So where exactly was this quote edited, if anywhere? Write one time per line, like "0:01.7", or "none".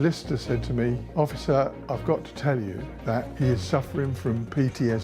0:01.0
0:01.8
0:03.3